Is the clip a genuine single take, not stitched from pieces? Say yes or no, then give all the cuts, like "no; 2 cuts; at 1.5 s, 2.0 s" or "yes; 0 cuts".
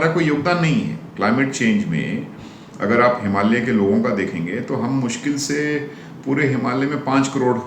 yes; 0 cuts